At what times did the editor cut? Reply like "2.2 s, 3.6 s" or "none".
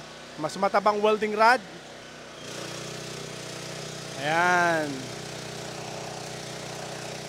2.0 s